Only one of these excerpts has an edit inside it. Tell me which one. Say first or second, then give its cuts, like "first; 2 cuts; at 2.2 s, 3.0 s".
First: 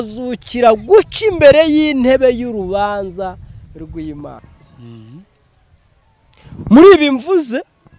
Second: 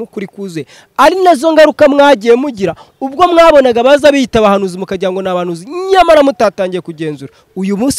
first; 1 cut; at 4.4 s